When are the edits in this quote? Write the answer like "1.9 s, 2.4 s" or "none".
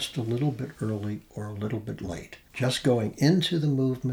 2.4 s